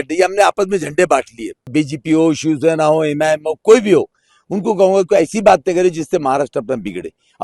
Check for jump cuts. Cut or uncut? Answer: cut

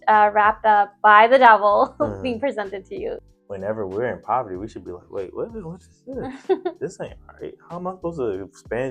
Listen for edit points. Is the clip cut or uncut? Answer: cut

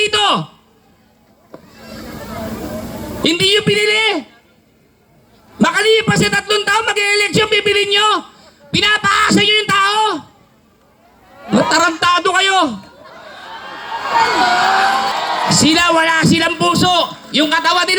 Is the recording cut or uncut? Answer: cut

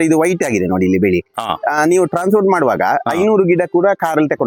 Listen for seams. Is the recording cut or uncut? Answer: uncut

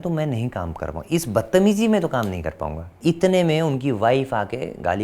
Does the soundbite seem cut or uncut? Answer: cut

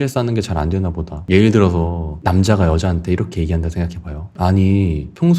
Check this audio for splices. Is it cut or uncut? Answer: cut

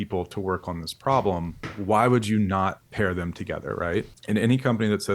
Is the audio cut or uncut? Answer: cut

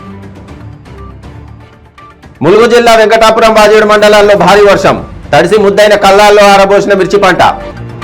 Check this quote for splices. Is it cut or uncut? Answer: uncut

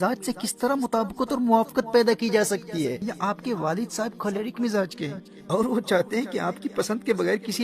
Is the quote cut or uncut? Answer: cut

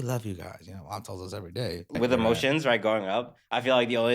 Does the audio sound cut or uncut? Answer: cut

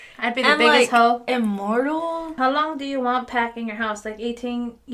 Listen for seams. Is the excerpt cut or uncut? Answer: cut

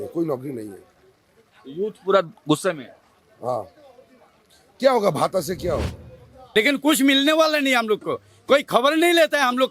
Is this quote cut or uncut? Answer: cut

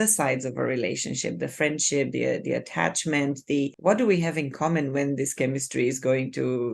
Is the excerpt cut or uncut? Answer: cut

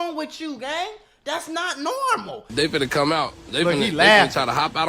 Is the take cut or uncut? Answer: cut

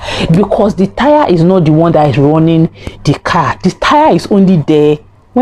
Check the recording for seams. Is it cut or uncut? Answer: uncut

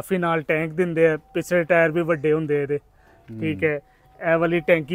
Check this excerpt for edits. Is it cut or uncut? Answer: uncut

